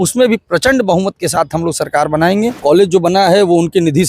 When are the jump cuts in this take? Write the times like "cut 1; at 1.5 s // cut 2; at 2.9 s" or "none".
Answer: cut 1; at 2.6 s